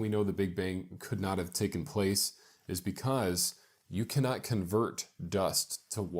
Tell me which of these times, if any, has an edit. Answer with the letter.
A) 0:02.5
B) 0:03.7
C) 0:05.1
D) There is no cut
A